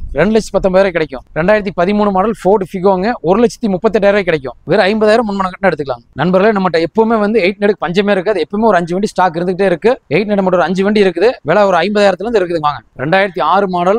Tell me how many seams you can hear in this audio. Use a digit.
2